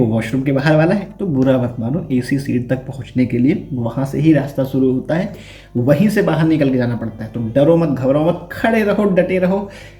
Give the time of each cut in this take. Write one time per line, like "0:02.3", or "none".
none